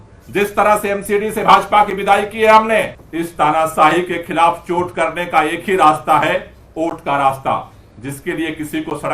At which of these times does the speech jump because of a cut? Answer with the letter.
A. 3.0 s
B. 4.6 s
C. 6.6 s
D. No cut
A